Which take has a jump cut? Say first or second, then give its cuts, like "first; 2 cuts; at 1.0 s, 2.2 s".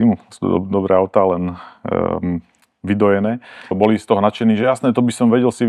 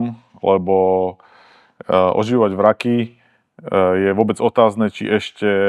first; 1 cut; at 3.7 s